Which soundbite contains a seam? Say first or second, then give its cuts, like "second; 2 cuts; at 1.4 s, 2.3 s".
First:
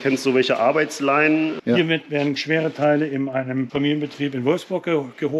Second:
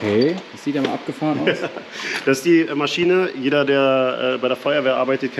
first; 2 cuts; at 1.6 s, 3.7 s